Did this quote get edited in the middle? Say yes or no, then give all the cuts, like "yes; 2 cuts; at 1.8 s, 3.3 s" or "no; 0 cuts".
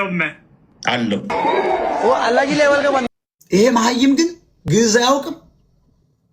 yes; 1 cut; at 3.1 s